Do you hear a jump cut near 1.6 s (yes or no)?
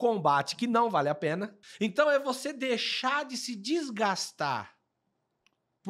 yes